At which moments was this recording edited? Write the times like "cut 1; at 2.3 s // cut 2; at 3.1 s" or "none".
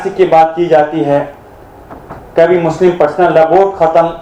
none